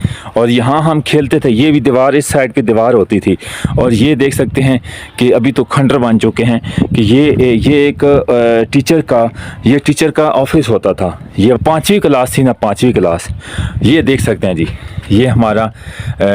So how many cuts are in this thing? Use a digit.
1